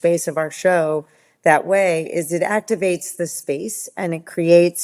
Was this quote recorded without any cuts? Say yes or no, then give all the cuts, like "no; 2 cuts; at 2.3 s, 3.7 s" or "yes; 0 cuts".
yes; 0 cuts